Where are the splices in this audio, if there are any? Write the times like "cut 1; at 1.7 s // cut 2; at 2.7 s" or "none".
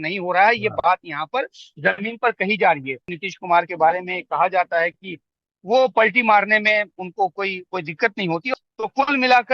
cut 1; at 3.2 s // cut 2; at 8.5 s